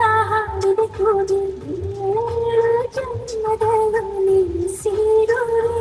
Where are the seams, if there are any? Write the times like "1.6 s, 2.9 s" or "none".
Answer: none

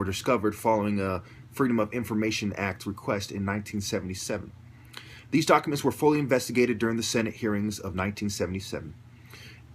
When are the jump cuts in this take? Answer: 6.6 s

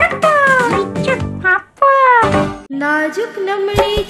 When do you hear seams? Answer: none

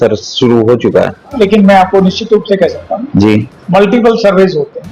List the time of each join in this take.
1.4 s

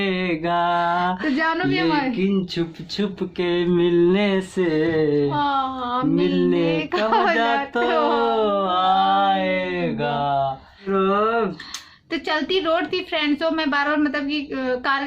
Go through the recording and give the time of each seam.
10.9 s

